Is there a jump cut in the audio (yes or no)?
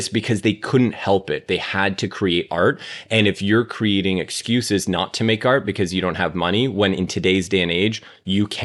no